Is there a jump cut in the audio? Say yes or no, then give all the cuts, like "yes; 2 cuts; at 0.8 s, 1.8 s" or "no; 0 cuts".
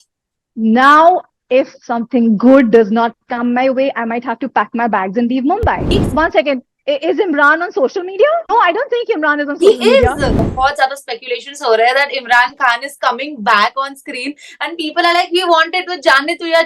yes; 2 cuts; at 5.9 s, 10.5 s